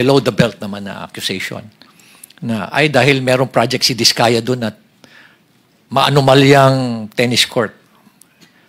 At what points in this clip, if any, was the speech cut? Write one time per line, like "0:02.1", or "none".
none